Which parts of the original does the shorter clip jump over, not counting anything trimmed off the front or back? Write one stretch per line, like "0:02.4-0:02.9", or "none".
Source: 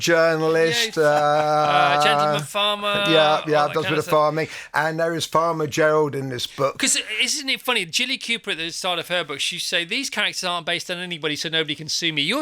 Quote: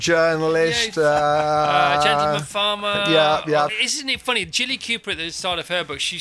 0:03.7-0:07.1

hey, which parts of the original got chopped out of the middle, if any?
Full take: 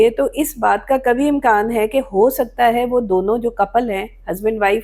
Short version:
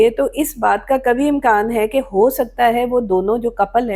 none

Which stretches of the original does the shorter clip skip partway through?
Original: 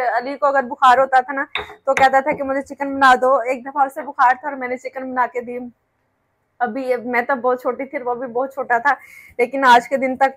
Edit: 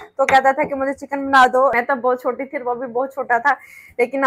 0:03.4-0:07.1

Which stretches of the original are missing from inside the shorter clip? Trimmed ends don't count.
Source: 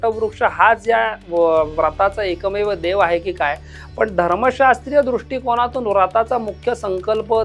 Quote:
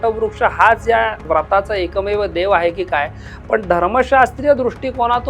0:01.2-0:01.7

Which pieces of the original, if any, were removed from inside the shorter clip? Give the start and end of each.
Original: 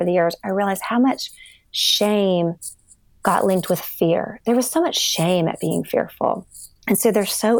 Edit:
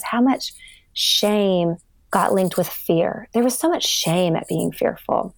0:02.7-0:03.0

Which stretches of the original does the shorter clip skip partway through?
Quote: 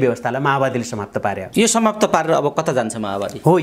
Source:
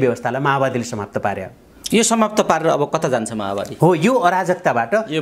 0:01.4-0:01.8

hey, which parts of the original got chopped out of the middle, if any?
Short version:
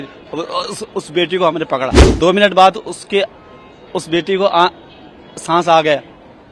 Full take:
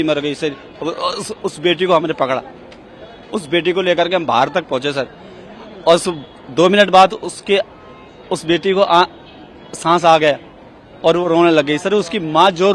0:02.5-0:06.4

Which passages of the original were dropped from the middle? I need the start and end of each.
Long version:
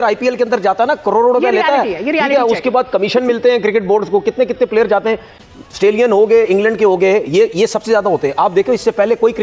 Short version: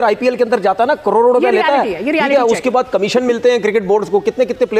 none

